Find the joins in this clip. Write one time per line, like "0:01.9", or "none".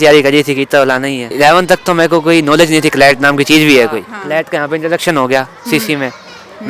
0:01.3
0:04.1